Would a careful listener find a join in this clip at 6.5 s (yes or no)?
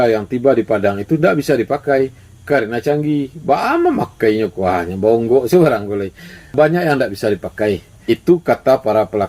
yes